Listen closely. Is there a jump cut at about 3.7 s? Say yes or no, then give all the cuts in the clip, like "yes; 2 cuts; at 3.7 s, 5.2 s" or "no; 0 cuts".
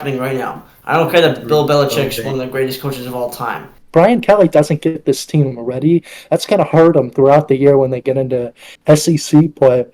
yes; 1 cut; at 3.7 s